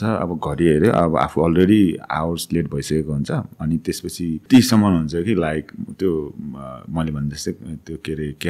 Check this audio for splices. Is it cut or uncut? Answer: cut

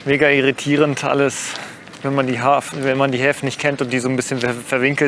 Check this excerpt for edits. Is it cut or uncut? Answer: uncut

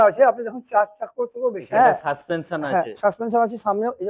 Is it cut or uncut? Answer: cut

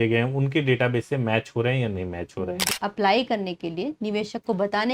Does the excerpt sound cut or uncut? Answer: cut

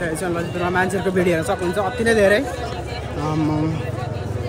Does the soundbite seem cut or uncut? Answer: uncut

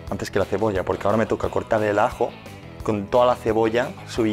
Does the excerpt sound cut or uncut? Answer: uncut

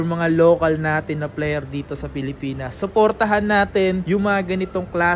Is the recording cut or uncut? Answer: uncut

